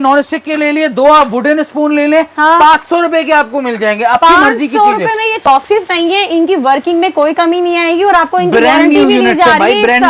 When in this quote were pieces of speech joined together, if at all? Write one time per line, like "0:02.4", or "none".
0:05.4